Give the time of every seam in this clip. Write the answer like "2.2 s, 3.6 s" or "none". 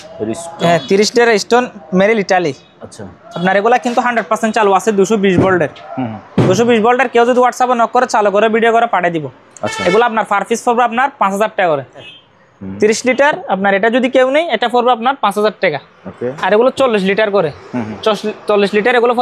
12.1 s